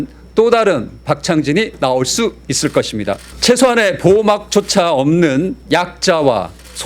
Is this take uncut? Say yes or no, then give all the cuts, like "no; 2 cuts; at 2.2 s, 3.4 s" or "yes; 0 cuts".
no; 2 cuts; at 3.3 s, 5.6 s